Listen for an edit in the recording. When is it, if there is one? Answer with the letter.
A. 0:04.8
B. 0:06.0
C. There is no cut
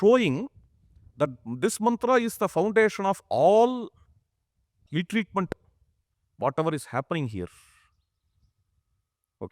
A